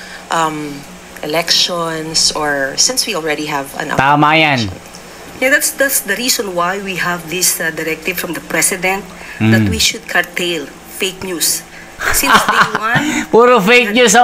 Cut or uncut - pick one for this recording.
uncut